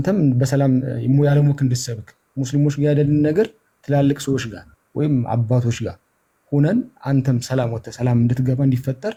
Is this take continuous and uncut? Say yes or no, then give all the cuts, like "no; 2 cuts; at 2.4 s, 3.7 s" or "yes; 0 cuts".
yes; 0 cuts